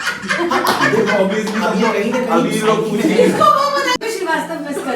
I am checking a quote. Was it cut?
yes; 1 cut; at 4.0 s

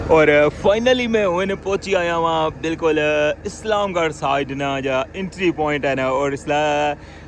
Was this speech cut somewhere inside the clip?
no; 0 cuts

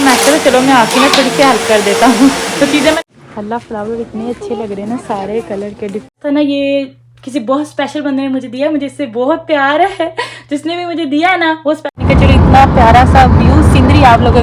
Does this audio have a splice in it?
yes; 3 cuts; at 3.0 s, 6.1 s, 12.0 s

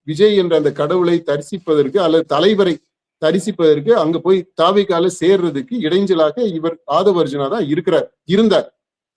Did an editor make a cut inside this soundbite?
no; 0 cuts

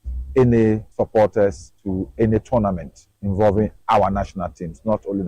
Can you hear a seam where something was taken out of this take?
yes; 2 cuts; at 0.9 s, 3.8 s

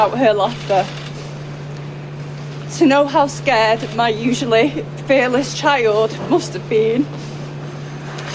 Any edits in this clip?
no; 0 cuts

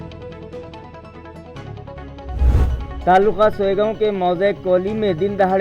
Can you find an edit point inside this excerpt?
yes; 1 cut; at 2.9 s

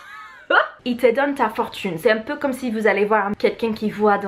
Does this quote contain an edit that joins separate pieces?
yes; 2 cuts; at 0.8 s, 3.3 s

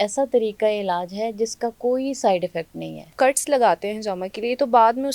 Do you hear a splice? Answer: yes; 1 cut; at 3.1 s

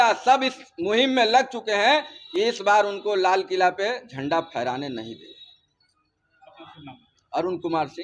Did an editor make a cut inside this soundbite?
no; 0 cuts

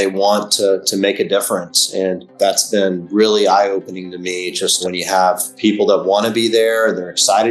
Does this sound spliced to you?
yes; 2 cuts; at 2.3 s, 4.8 s

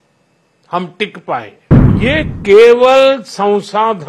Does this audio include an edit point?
yes; 1 cut; at 2.0 s

